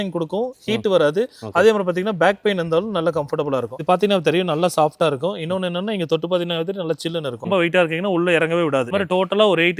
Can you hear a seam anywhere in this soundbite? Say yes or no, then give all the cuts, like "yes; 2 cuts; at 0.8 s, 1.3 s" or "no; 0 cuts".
yes; 3 cuts; at 3.8 s, 7.5 s, 8.9 s